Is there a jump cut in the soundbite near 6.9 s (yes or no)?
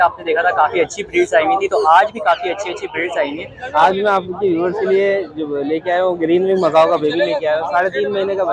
no